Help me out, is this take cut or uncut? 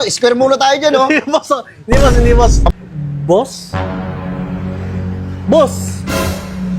cut